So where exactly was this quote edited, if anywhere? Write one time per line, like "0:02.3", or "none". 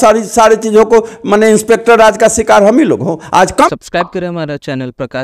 0:03.7